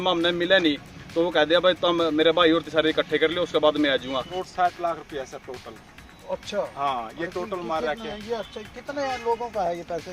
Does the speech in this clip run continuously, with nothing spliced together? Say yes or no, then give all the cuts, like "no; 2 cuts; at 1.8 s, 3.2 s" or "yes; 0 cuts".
no; 1 cut; at 4.4 s